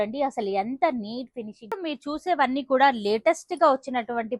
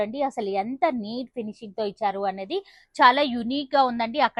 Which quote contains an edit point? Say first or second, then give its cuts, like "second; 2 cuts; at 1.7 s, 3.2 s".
first; 1 cut; at 1.8 s